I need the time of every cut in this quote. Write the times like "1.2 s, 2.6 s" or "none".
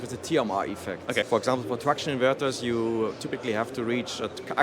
1.3 s